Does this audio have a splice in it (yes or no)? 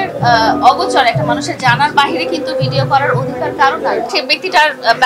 yes